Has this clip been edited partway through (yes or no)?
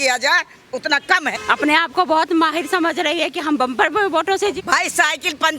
yes